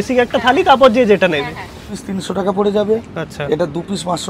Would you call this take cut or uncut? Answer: cut